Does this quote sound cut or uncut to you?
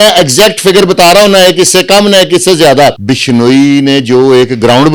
cut